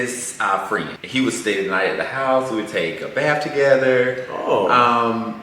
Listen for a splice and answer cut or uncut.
cut